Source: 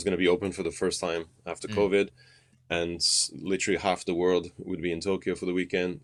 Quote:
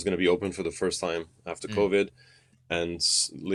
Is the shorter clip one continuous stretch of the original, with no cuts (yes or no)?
yes